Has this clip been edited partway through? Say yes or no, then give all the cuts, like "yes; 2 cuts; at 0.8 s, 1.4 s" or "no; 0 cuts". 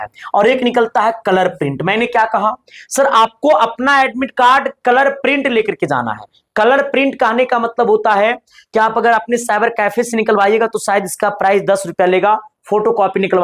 no; 0 cuts